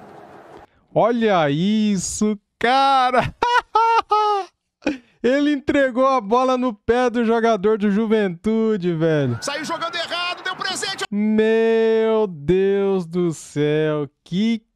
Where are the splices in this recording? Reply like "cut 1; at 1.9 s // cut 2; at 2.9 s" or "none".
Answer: none